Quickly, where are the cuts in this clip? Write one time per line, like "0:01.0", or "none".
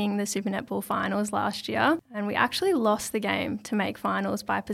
0:02.1